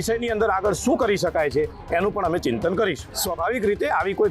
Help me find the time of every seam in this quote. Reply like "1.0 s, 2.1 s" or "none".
3.1 s